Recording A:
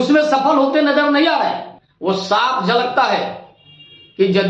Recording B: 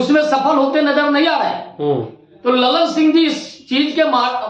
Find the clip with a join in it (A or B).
A